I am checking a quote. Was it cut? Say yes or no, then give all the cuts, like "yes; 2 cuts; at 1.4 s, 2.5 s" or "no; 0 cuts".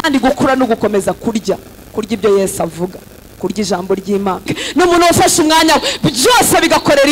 yes; 1 cut; at 4.6 s